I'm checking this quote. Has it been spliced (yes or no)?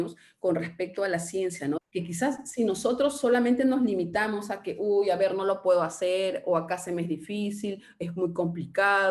yes